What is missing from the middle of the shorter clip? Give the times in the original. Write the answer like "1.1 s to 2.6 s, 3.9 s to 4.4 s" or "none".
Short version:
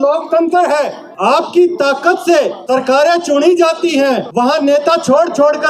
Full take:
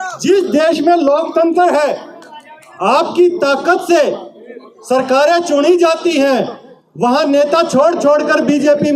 2.1 s to 2.7 s, 4.2 s to 4.8 s, 6.5 s to 6.9 s